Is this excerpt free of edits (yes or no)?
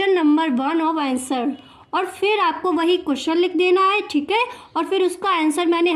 yes